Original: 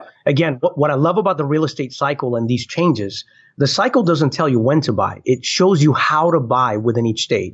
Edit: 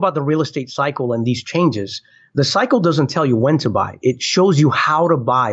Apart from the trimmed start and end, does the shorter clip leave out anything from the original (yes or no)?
no